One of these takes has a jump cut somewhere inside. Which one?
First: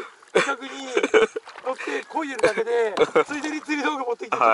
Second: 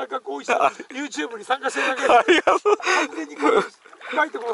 second; 1 cut; at 2.8 s

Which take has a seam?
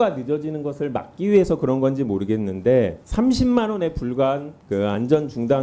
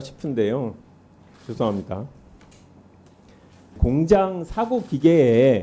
second; 1 cut; at 3.6 s

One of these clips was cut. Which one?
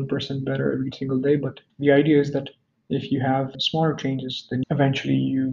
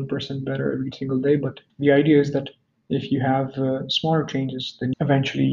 first; 1 cut; at 3.5 s

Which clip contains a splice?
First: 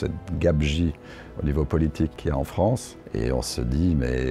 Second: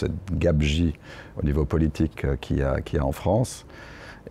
first; 2 cuts; at 2.2 s, 3.0 s

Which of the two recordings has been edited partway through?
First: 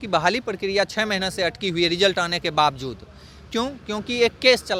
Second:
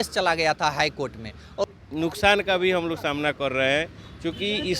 second; 1 cut; at 1.7 s

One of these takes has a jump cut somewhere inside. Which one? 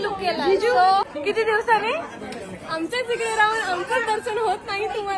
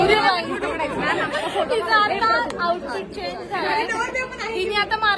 first; 1 cut; at 1.1 s

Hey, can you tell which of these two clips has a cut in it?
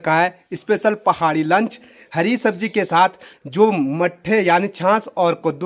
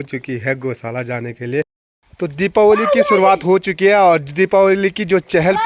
second; 1 cut; at 1.8 s

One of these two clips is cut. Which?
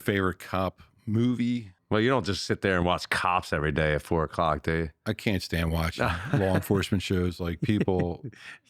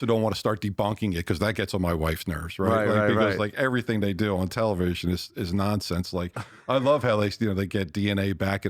first; 1 cut; at 1.8 s

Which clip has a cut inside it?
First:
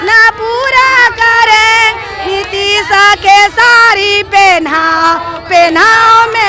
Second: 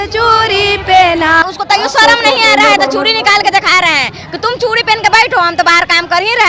second; 1 cut; at 1.4 s

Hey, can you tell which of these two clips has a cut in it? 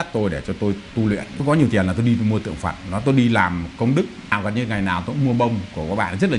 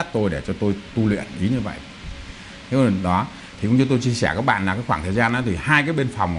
first; 2 cuts; at 1.4 s, 4.3 s

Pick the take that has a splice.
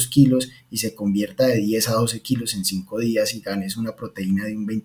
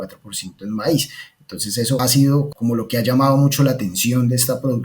second; 1 cut; at 2.4 s

